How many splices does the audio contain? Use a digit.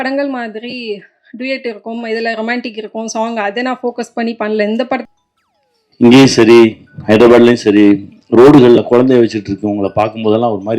1